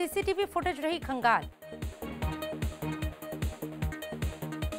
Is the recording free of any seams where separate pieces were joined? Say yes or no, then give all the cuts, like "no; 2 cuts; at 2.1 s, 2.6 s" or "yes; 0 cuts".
no; 1 cut; at 1.6 s